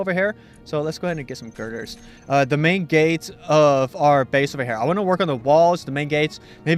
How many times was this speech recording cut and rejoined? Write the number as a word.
one